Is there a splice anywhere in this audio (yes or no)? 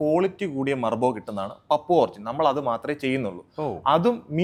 no